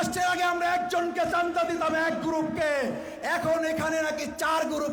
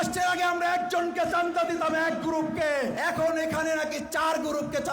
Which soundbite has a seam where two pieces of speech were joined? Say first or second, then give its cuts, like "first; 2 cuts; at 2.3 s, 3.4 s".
second; 1 cut; at 3.0 s